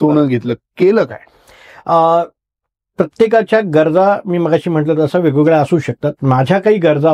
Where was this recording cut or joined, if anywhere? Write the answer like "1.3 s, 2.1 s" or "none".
none